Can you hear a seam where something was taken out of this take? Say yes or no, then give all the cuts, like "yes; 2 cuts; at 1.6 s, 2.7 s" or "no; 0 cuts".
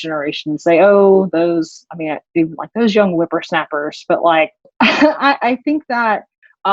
yes; 1 cut; at 4.6 s